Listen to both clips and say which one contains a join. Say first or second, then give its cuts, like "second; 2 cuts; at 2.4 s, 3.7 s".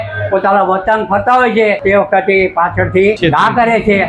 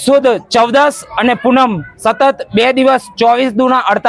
first; 2 cuts; at 1.8 s, 3.2 s